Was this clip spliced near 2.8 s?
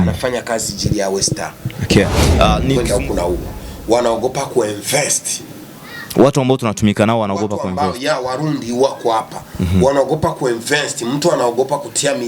yes; 1 cut; at 2.8 s

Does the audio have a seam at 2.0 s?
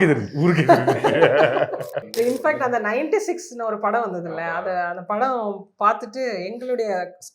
yes; 1 cut; at 2.0 s

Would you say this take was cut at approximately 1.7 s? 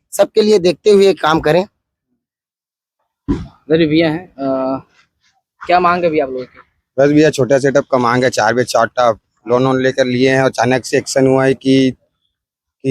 no; 0 cuts

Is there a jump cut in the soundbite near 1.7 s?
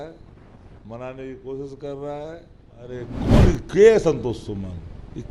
no; 1 cut; at 3.1 s

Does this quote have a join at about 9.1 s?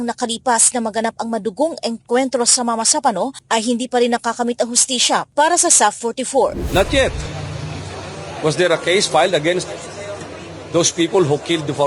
no; 1 cut; at 6.6 s

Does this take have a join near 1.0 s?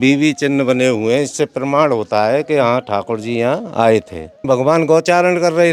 no; 1 cut; at 4.4 s

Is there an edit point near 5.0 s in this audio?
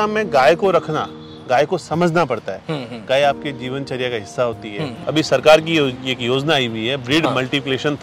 yes; 1 cut; at 5.0 s

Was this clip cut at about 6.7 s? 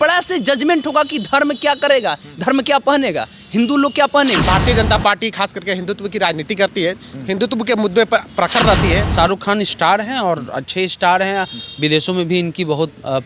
no; 2 cuts; at 4.5 s, 9.1 s

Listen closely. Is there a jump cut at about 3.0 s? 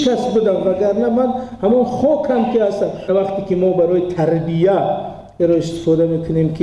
yes; 1 cut; at 3.0 s

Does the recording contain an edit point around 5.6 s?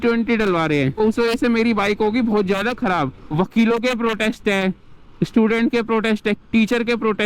no; 2 cuts; at 1.0 s, 3.2 s

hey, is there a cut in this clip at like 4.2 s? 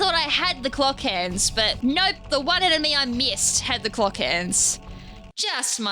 no; 1 cut; at 1.7 s

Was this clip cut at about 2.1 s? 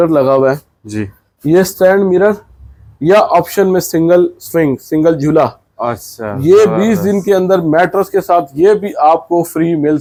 no; 0 cuts

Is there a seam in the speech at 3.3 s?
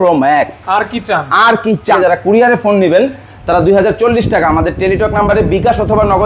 no; 1 cut; at 2.0 s

